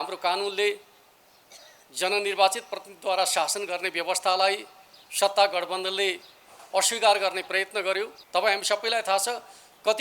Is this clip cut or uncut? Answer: cut